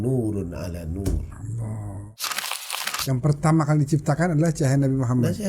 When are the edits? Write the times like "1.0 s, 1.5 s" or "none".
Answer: 2.5 s